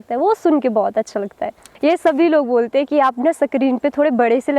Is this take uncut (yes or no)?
no